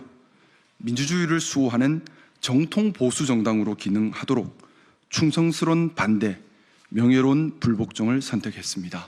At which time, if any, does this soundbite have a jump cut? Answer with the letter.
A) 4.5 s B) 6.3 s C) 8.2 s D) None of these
B